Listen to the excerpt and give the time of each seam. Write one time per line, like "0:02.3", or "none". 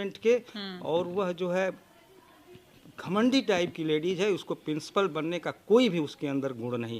none